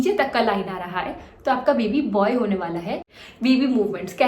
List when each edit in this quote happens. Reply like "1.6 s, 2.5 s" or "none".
3.1 s